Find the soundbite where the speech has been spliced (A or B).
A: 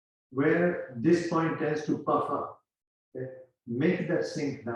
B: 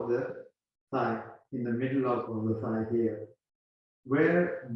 B